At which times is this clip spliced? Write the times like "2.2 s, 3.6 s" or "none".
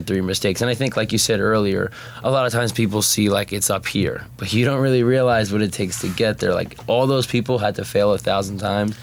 none